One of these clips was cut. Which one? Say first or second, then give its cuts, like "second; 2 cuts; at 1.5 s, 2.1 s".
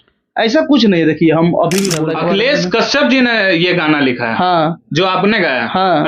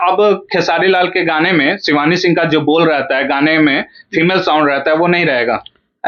first; 1 cut; at 2.0 s